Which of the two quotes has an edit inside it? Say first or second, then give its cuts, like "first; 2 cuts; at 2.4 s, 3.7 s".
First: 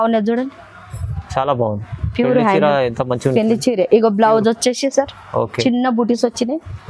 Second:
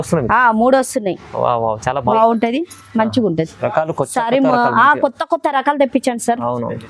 second; 1 cut; at 2.1 s